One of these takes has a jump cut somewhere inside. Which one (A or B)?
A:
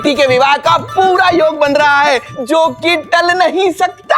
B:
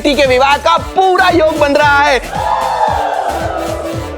A